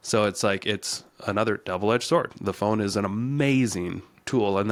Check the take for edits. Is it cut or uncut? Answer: uncut